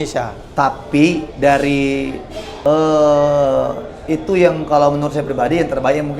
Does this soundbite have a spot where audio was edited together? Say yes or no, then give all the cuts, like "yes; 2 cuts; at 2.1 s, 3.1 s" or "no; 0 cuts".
yes; 1 cut; at 2.5 s